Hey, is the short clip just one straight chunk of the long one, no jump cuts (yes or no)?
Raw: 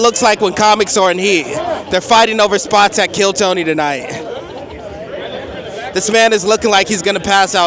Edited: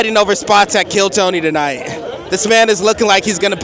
no